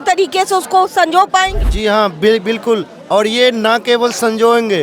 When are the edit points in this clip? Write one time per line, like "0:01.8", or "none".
0:01.6